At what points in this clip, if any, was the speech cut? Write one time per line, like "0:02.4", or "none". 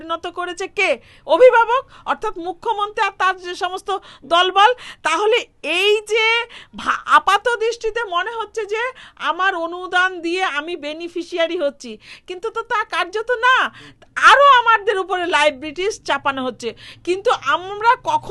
none